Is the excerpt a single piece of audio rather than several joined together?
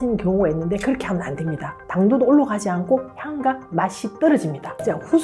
no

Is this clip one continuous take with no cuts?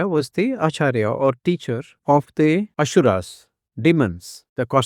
yes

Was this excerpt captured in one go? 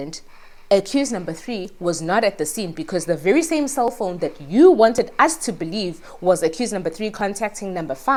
yes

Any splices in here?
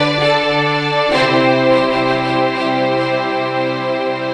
no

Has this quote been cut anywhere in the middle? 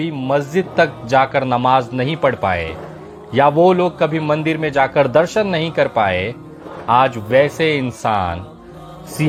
no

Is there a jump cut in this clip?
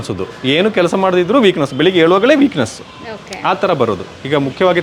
no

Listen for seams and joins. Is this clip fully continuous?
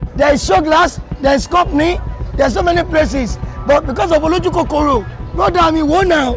no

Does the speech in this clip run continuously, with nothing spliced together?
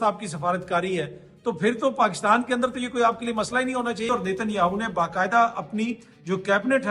no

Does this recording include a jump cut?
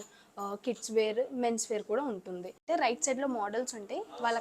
yes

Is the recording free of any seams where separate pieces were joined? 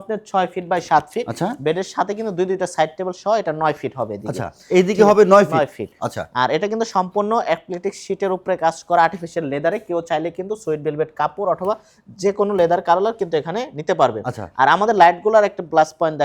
yes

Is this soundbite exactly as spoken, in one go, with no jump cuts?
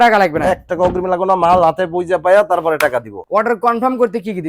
yes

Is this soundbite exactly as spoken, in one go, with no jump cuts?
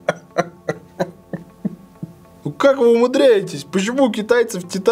no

